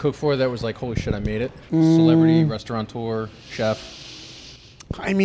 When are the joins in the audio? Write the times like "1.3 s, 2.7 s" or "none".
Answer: none